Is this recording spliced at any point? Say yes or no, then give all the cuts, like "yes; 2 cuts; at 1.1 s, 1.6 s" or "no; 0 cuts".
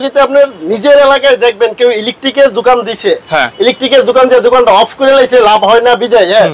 no; 0 cuts